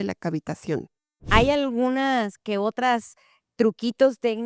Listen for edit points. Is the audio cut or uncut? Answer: cut